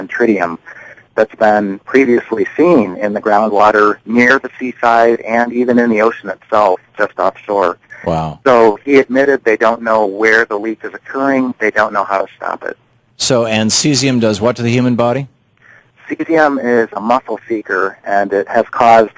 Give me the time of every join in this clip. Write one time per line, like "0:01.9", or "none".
none